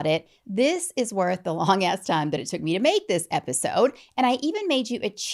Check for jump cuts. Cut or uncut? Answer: uncut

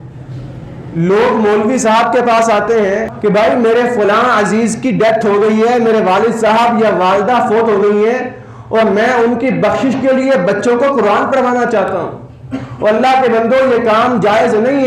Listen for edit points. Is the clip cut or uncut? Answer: cut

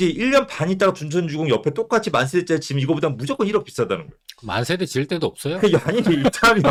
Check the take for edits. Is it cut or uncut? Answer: uncut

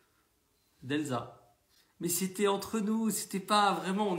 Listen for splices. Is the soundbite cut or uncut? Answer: uncut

